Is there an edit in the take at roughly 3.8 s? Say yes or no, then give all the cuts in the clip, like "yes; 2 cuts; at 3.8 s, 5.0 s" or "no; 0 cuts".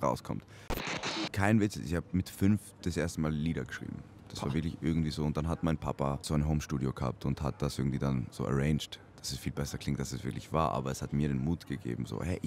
no; 2 cuts; at 0.9 s, 6.3 s